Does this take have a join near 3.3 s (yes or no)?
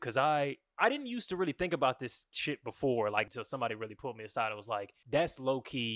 yes